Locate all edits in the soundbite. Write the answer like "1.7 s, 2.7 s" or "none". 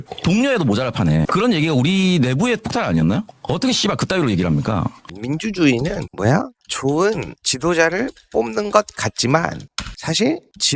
3.3 s, 5.1 s